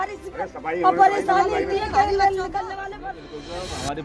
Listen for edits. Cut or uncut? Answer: cut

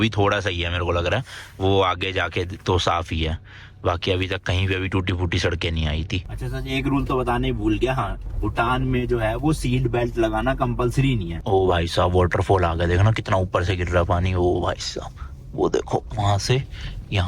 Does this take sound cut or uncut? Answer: cut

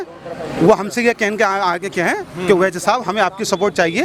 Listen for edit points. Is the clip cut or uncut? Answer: uncut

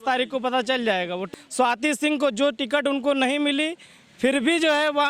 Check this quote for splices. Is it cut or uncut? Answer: cut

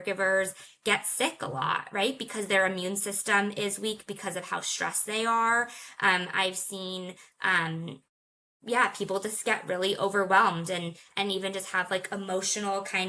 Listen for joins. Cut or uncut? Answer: uncut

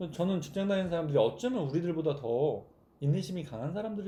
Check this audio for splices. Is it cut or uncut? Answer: uncut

